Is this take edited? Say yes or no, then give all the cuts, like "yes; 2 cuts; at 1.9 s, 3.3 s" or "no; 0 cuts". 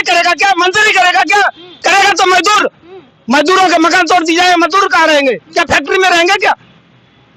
no; 0 cuts